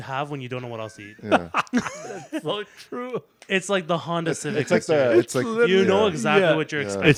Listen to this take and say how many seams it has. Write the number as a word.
zero